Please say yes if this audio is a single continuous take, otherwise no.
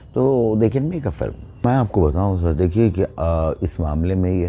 yes